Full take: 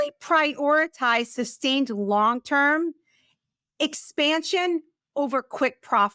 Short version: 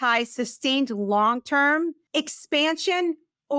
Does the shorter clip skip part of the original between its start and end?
yes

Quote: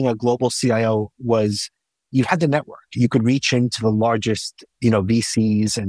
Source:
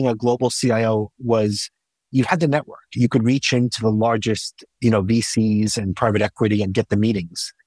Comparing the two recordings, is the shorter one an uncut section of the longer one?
yes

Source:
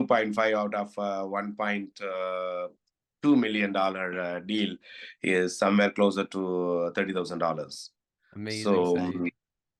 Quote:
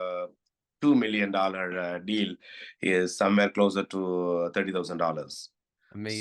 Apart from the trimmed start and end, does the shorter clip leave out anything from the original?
no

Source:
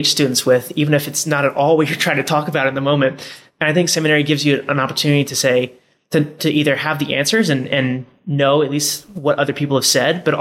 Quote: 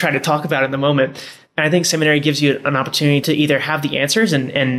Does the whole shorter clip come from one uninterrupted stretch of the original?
no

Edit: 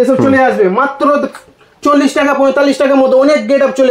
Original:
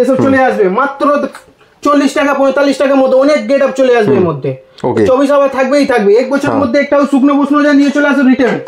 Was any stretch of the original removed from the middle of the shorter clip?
no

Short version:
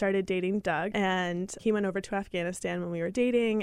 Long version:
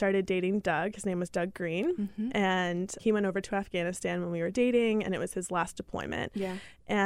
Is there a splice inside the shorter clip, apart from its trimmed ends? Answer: yes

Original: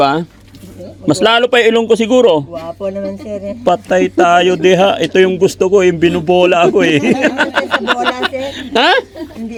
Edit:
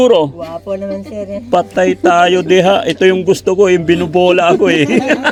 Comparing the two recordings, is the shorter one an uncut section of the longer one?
yes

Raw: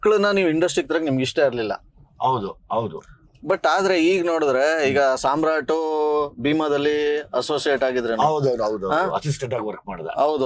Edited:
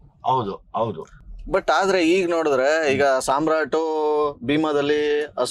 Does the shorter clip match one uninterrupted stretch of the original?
yes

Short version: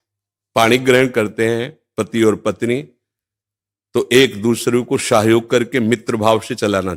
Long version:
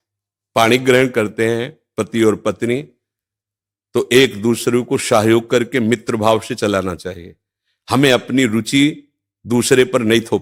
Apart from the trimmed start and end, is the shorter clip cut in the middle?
no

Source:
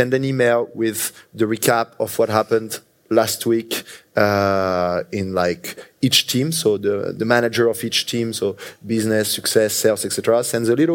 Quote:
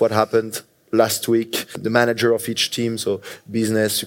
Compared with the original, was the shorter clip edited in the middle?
yes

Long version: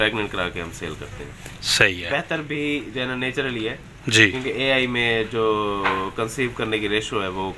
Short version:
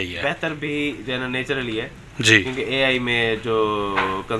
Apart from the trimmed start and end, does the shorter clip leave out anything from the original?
no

